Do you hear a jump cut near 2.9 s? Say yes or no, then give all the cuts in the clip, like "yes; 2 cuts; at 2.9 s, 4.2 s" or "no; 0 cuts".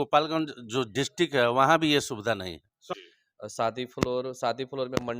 yes; 1 cut; at 2.9 s